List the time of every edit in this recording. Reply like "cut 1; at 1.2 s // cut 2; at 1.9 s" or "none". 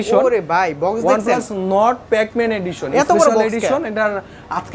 none